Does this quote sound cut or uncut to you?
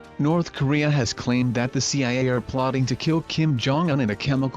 cut